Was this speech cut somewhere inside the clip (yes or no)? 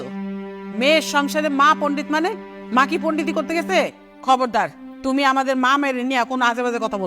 yes